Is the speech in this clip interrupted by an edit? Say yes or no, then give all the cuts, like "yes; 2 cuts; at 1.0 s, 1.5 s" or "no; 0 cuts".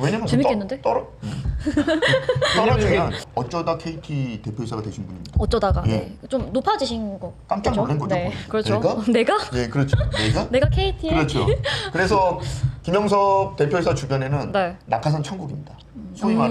yes; 1 cut; at 3.2 s